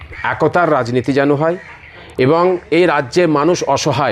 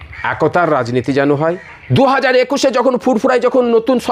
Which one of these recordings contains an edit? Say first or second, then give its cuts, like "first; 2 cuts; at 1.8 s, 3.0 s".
second; 1 cut; at 1.7 s